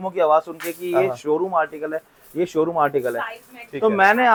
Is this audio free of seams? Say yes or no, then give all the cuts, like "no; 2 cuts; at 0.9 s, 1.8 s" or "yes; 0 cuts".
yes; 0 cuts